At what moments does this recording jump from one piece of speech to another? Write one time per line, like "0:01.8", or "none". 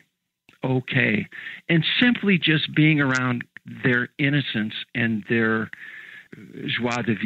0:06.3